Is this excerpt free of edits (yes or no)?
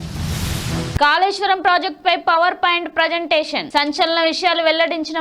no